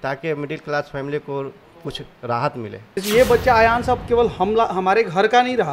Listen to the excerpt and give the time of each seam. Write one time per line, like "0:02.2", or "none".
0:03.0